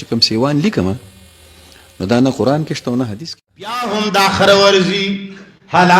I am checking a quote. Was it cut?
yes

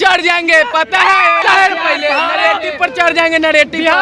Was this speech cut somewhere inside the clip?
yes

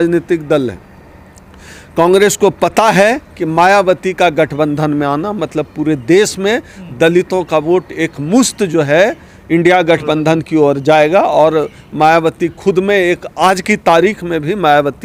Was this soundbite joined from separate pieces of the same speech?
no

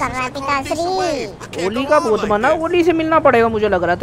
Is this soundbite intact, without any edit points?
yes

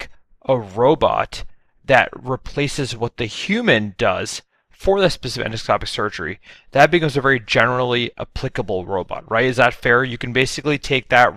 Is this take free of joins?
yes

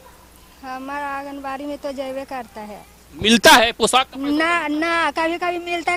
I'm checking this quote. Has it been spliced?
no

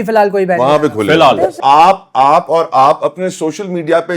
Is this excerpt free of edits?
no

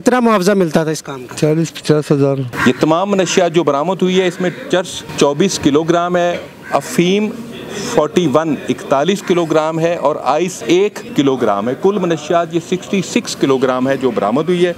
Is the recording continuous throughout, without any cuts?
no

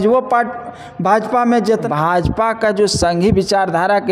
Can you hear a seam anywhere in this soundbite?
yes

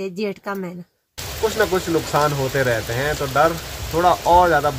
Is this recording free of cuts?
no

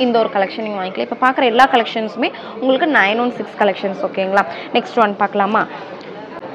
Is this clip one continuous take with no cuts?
yes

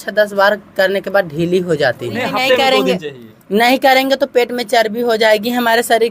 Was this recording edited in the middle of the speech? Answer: yes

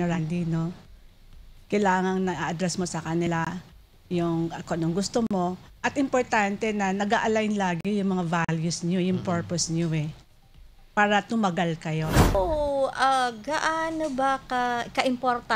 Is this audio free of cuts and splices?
no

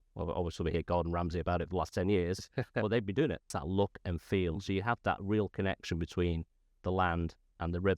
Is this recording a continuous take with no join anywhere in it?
no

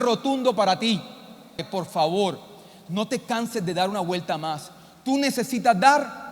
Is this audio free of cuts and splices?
no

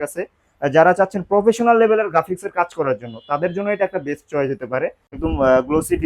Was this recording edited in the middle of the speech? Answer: yes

